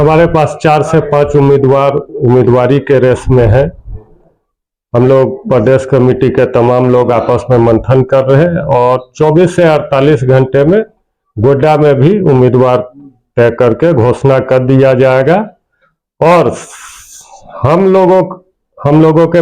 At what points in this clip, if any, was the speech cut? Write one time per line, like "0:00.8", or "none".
none